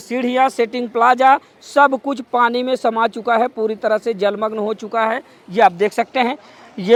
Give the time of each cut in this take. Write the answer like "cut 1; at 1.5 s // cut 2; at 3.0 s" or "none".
none